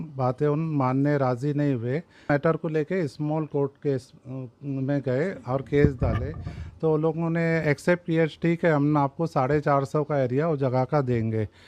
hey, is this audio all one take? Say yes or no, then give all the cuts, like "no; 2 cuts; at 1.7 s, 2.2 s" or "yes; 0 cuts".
no; 1 cut; at 2.3 s